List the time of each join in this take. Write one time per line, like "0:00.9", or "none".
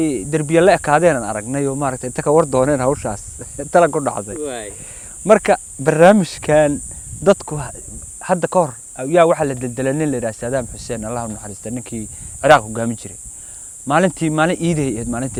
none